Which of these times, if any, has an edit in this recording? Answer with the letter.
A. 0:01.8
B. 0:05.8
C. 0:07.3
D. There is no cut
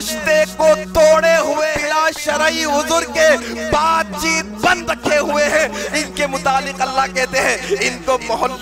A